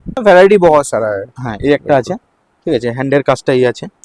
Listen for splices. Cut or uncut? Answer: uncut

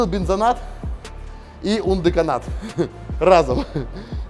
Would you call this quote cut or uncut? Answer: uncut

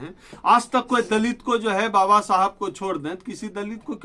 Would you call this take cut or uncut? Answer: uncut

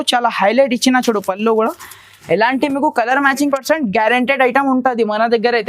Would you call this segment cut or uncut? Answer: cut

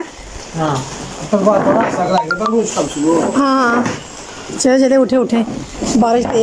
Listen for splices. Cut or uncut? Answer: uncut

